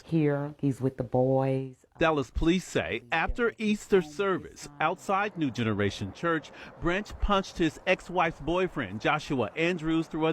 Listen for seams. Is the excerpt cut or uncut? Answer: cut